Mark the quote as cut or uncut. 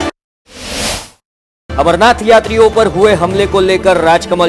cut